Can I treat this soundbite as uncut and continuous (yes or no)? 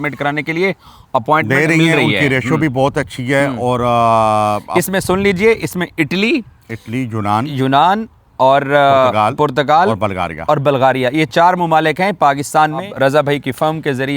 no